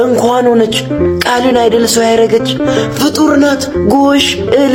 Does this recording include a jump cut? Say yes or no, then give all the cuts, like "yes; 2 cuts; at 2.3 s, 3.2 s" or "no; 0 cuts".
no; 0 cuts